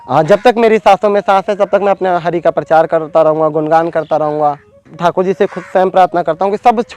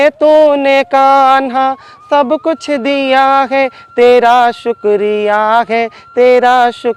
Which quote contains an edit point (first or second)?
first